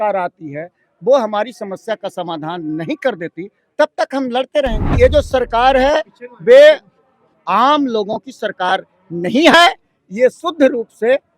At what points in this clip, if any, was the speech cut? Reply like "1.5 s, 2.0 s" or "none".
4.9 s